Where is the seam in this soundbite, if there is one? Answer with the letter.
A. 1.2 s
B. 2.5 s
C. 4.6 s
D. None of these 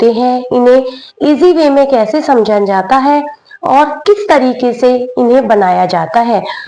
D